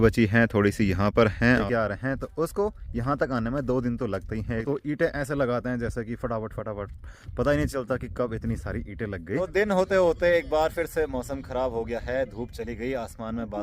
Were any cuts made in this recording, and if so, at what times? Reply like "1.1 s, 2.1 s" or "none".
1.6 s, 4.6 s, 9.4 s